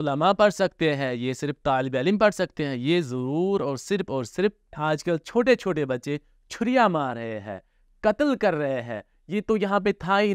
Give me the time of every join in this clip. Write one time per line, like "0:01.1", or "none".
0:04.8